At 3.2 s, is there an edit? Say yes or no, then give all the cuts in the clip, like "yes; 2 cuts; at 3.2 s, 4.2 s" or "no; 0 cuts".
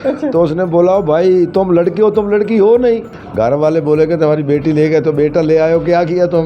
yes; 1 cut; at 3.2 s